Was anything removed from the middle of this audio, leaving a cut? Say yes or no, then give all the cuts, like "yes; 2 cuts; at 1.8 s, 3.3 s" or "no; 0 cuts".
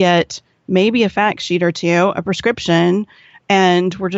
no; 0 cuts